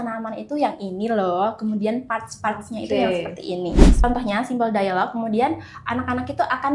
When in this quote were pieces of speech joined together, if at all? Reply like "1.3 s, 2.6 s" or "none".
4.0 s